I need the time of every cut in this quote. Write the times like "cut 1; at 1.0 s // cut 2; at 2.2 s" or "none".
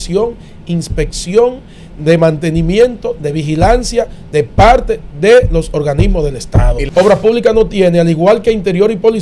cut 1; at 6.8 s